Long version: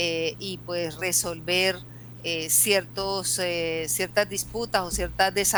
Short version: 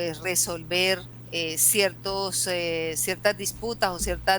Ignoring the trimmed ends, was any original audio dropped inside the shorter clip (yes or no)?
yes